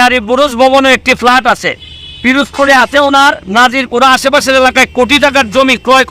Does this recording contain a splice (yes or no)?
no